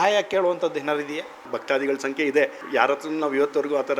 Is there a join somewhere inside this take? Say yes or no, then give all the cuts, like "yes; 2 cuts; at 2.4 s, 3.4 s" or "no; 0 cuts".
yes; 2 cuts; at 1.5 s, 2.6 s